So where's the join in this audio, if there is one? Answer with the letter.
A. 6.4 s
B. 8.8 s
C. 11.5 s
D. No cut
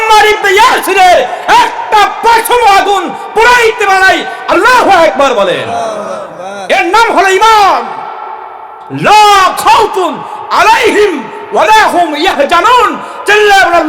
B